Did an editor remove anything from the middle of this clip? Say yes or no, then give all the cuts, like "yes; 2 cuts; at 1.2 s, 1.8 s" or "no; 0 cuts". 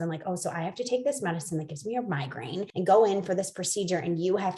yes; 1 cut; at 2.7 s